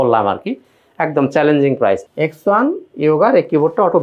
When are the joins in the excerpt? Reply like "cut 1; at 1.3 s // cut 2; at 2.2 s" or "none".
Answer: cut 1; at 2.0 s